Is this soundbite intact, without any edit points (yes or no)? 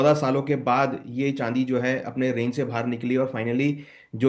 yes